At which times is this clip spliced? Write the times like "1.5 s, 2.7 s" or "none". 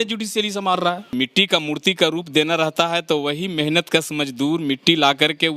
1.1 s